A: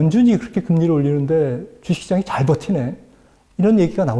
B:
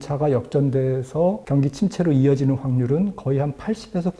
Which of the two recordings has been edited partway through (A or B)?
B